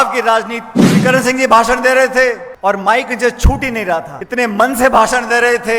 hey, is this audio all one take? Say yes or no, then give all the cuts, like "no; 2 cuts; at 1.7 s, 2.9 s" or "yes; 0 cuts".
no; 3 cuts; at 1.0 s, 2.5 s, 4.2 s